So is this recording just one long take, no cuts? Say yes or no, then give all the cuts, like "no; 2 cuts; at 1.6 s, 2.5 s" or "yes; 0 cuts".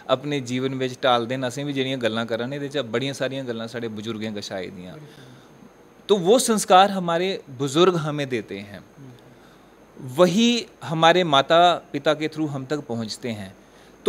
yes; 0 cuts